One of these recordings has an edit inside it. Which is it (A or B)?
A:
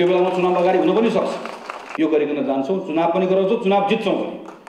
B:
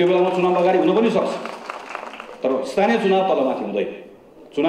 A